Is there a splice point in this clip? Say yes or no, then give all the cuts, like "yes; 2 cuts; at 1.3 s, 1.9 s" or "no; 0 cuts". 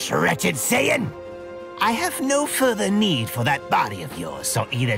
yes; 1 cut; at 1.6 s